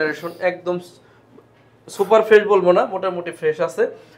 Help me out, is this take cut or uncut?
uncut